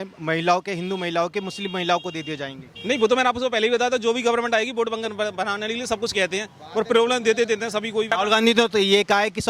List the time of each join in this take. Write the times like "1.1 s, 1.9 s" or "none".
none